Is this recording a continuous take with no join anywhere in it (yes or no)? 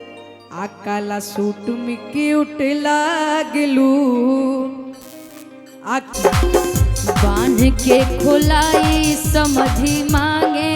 no